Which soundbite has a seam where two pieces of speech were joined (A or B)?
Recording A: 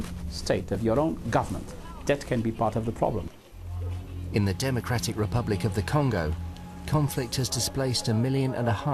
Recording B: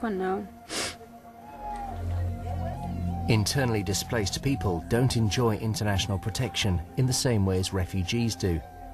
B